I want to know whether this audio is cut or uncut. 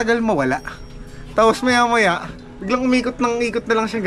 uncut